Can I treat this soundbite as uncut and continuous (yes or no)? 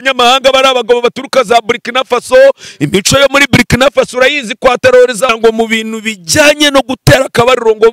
no